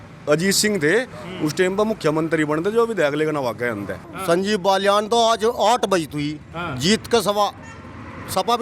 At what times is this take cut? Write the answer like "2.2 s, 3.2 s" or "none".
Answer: 4.1 s